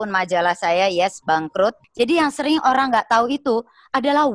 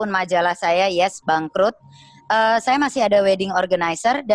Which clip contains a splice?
first; 1 cut; at 1.8 s

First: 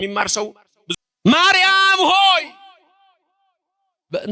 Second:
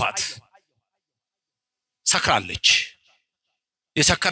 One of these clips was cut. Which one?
first; 1 cut; at 0.9 s

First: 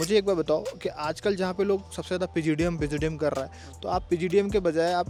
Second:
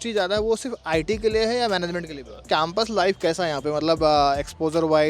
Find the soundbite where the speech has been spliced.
second; 1 cut; at 2.5 s

